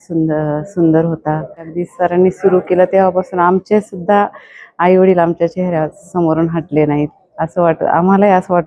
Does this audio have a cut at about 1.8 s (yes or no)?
yes